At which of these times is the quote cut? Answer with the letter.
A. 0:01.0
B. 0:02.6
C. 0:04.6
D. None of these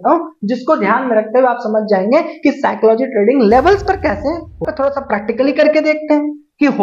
C